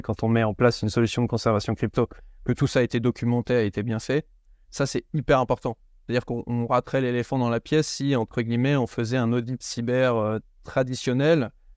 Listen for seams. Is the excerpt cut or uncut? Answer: uncut